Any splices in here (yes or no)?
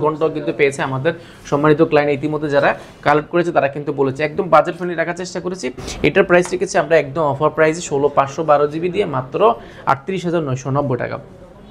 no